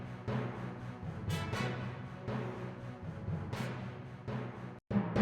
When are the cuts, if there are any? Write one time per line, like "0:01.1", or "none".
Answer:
none